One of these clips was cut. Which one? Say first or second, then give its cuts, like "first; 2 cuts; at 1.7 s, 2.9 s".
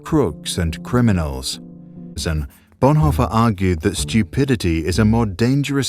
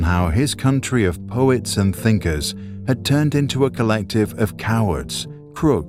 first; 1 cut; at 2.2 s